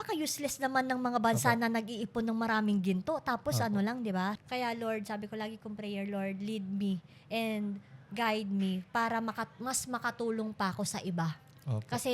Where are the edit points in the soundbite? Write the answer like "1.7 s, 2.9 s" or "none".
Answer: 4.4 s